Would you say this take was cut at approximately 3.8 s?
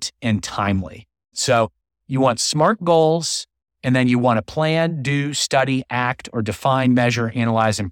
no; 1 cut; at 1.3 s

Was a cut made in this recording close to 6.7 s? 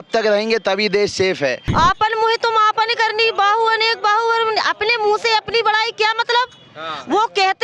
no; 1 cut; at 1.6 s

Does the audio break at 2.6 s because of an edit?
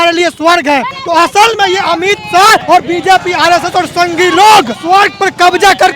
yes; 3 cuts; at 1.0 s, 2.6 s, 4.8 s

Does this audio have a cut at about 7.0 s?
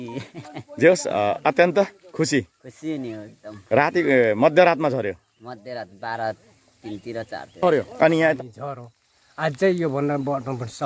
no; 1 cut; at 8.4 s

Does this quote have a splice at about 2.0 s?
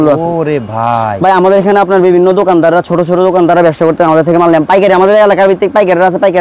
no; 0 cuts

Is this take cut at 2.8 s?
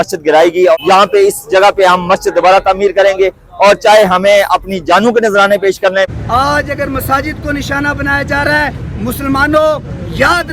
no; 2 cuts; at 0.8 s, 6.1 s

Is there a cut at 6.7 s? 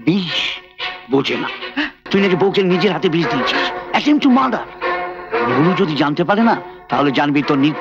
no; 1 cut; at 1.9 s

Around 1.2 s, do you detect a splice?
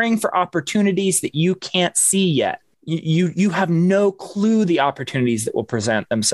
no; 1 cut; at 2.7 s

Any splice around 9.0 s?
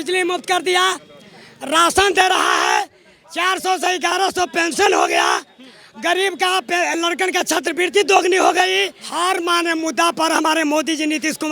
yes; 1 cut; at 9.0 s

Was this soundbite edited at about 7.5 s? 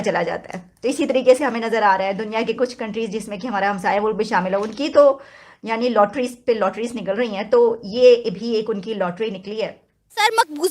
no; 0 cuts

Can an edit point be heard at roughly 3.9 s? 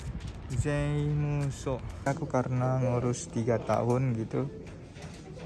no; 1 cut; at 2.1 s

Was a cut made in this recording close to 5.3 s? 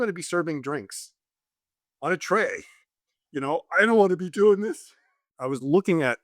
yes; 1 cut; at 5.3 s

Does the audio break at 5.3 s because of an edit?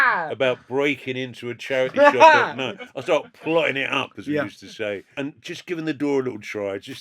yes; 1 cut; at 5.3 s

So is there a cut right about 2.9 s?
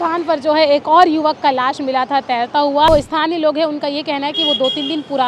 yes; 1 cut; at 2.9 s

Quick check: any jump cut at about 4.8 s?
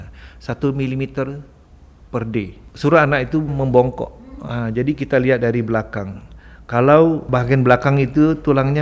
no; 3 cuts; at 2.6 s, 3.5 s, 7.2 s

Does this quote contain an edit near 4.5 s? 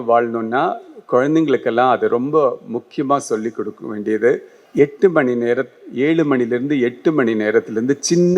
yes; 1 cut; at 4.5 s

